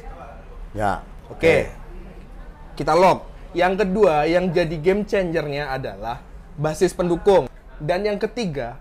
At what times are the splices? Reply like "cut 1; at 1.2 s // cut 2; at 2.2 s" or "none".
cut 1; at 7.6 s